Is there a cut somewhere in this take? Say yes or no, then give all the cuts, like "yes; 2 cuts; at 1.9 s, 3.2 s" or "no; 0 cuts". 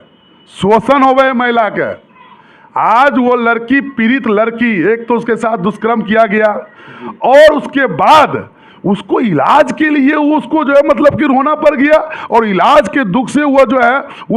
no; 0 cuts